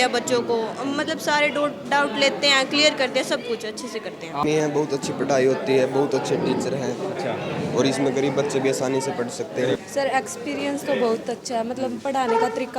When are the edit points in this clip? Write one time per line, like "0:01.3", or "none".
0:04.4
0:09.8